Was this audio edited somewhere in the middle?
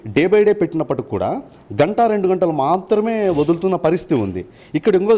no; 0 cuts

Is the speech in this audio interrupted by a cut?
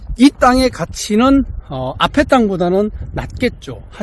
no; 0 cuts

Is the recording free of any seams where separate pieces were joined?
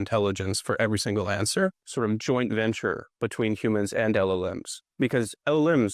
no; 1 cut; at 1.8 s

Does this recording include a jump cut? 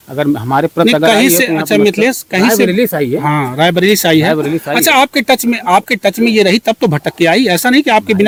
no; 0 cuts

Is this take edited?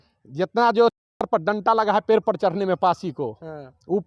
no; 0 cuts

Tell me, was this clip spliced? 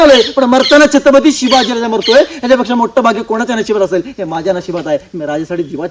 no; 0 cuts

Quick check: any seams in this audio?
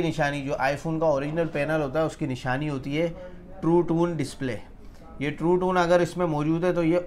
no; 0 cuts

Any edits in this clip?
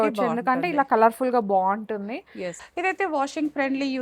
yes; 1 cut; at 2.6 s

